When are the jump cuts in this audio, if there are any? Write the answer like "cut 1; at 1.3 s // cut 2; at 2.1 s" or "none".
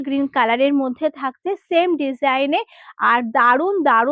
none